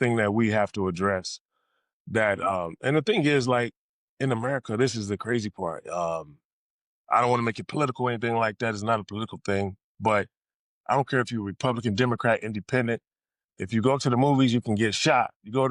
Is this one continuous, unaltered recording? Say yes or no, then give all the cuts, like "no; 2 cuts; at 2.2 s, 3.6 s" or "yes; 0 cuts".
yes; 0 cuts